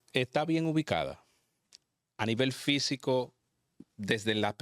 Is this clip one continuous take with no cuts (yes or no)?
yes